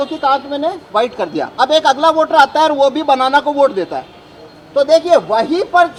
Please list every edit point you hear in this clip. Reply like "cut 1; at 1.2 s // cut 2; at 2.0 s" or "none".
none